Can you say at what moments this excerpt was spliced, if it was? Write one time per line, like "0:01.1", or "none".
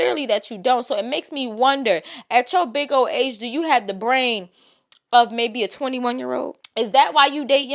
0:06.6